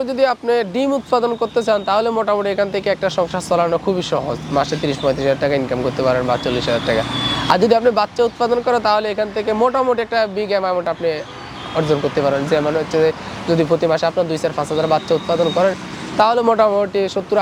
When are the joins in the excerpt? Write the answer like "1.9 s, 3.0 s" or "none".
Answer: none